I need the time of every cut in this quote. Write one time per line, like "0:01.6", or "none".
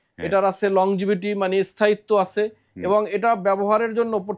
none